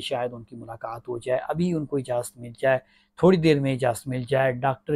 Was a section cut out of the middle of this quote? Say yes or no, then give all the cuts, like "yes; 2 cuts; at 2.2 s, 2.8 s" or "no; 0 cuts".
no; 0 cuts